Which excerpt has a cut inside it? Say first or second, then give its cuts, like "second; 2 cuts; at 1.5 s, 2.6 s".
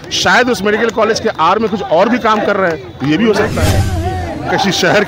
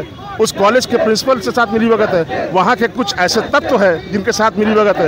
first; 1 cut; at 3.8 s